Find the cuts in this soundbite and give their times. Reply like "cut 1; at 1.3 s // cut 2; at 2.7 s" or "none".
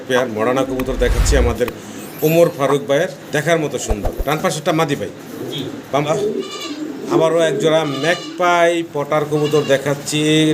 cut 1; at 6.1 s